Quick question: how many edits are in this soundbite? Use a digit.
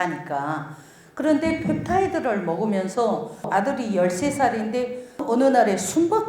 2